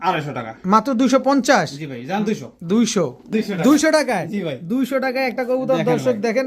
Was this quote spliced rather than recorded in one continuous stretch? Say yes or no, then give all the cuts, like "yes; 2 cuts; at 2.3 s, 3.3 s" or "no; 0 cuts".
no; 0 cuts